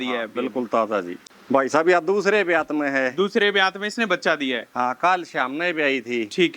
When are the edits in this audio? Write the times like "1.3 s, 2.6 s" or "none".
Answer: 1.2 s